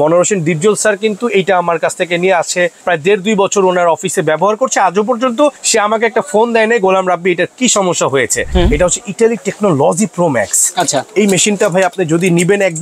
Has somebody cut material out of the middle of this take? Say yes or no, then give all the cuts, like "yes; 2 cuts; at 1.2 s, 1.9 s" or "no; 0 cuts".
yes; 3 cuts; at 2.8 s, 5.6 s, 8.4 s